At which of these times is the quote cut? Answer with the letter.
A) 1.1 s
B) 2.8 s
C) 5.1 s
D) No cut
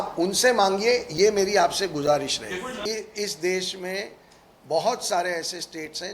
B